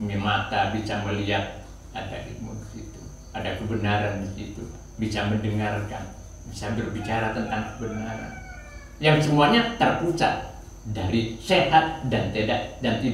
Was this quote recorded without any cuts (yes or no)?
yes